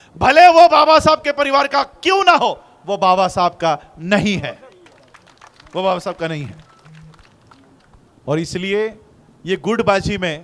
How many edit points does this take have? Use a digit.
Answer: 0